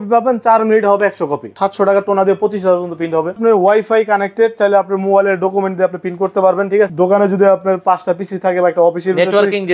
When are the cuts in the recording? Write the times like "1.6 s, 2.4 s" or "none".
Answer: 1.4 s, 3.4 s, 6.9 s